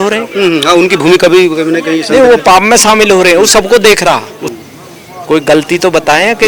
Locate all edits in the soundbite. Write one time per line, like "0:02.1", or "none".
0:04.4